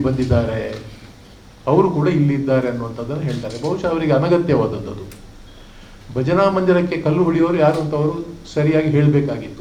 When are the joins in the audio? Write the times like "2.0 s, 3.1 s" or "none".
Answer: none